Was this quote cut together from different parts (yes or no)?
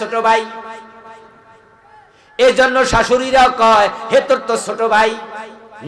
no